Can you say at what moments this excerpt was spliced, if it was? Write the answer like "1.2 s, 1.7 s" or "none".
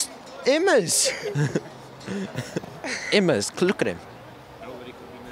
2.7 s